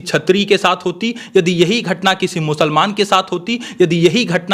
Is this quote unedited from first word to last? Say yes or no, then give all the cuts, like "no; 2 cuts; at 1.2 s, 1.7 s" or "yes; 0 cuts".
yes; 0 cuts